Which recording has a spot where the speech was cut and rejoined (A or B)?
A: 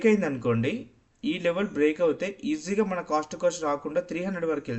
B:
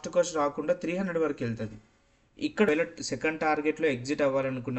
B